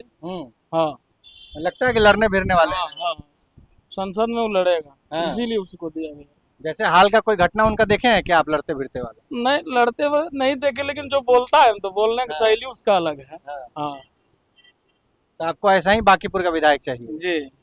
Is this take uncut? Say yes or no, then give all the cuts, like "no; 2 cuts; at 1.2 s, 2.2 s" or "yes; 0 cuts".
yes; 0 cuts